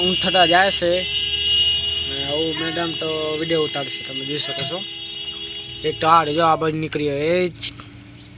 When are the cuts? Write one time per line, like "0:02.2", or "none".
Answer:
none